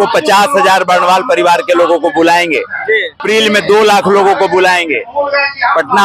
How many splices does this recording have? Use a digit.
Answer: 1